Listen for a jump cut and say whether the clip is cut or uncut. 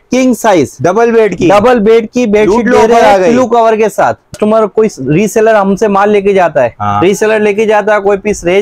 cut